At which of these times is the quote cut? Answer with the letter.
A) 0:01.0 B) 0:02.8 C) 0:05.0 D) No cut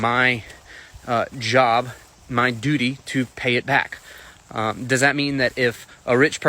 C